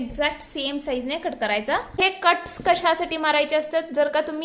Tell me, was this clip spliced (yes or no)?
yes